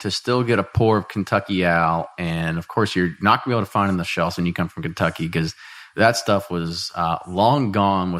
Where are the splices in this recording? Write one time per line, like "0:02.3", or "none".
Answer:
none

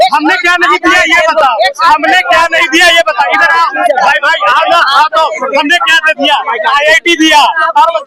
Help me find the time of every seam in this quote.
none

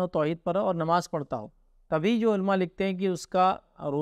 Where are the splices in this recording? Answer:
none

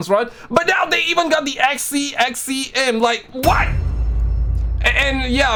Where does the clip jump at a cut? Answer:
none

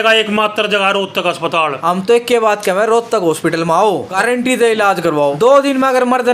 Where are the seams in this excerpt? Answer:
0:01.8
0:04.1
0:05.3

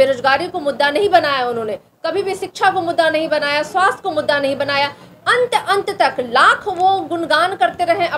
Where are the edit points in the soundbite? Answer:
none

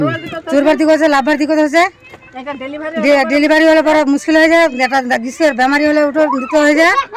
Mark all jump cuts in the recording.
none

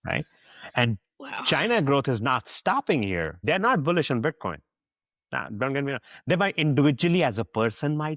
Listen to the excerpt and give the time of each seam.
0:03.3

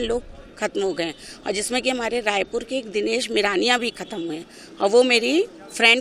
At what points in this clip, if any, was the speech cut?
none

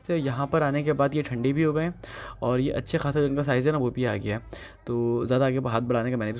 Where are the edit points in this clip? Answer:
none

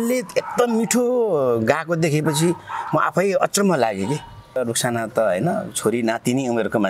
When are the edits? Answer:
0:04.6

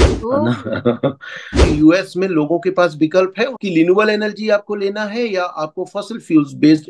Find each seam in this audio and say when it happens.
0:01.6
0:03.6

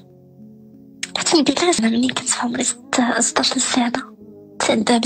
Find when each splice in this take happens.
0:01.8

